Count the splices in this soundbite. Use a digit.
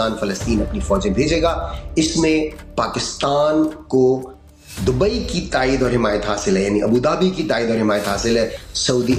0